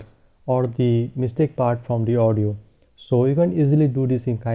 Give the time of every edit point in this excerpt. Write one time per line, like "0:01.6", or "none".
0:02.5